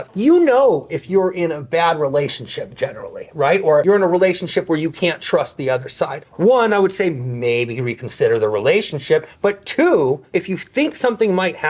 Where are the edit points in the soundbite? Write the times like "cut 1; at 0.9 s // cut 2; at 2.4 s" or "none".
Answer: cut 1; at 3.8 s